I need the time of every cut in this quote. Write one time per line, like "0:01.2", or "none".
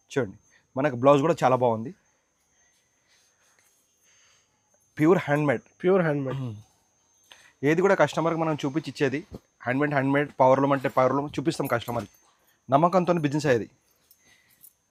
none